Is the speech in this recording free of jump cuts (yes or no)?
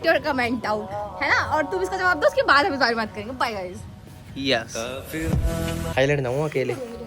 no